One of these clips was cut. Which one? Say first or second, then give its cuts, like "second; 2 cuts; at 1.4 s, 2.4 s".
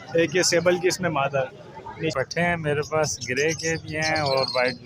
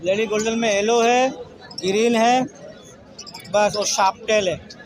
first; 1 cut; at 2.1 s